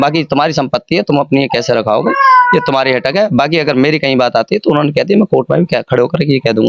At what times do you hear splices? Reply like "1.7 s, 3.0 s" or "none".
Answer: none